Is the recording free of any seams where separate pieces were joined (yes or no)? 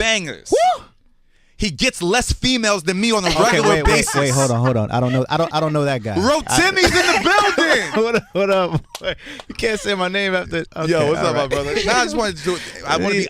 no